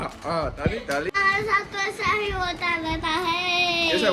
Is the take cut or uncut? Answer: cut